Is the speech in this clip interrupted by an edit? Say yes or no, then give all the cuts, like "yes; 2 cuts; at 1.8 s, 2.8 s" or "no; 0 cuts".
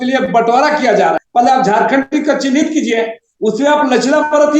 yes; 1 cut; at 1.2 s